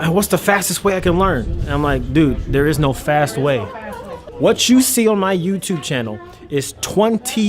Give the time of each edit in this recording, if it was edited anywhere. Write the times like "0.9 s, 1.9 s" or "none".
4.2 s